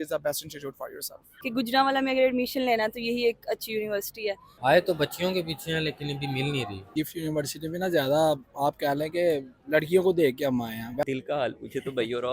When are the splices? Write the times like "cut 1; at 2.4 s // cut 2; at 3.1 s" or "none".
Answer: cut 1; at 1.2 s // cut 2; at 4.5 s // cut 3; at 6.9 s // cut 4; at 11.0 s

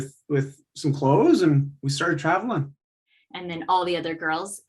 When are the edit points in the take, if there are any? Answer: cut 1; at 2.8 s

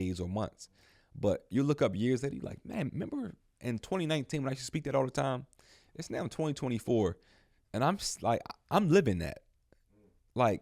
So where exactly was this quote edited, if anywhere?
none

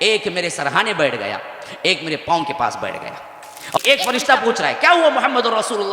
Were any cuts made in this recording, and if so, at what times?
cut 1; at 3.8 s

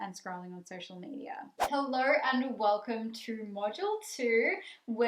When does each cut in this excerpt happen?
cut 1; at 1.8 s

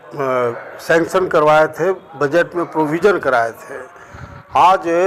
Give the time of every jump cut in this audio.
none

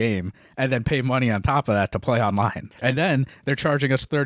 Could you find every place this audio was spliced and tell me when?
cut 1; at 2.7 s

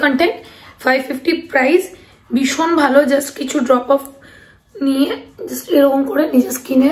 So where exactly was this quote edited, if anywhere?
none

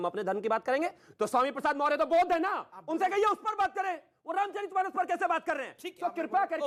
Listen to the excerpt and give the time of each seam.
none

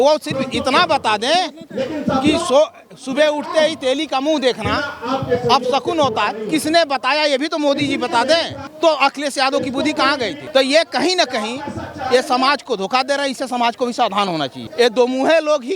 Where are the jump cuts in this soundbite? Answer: cut 1; at 8.6 s // cut 2; at 10.4 s // cut 3; at 14.6 s

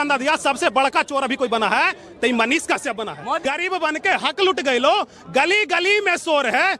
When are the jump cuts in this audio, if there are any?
cut 1; at 3.4 s

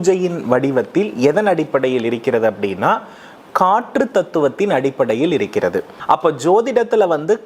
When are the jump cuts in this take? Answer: cut 1; at 5.9 s

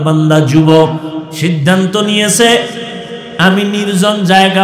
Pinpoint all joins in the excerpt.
cut 1; at 1.3 s

